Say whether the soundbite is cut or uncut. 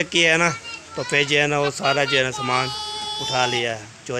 uncut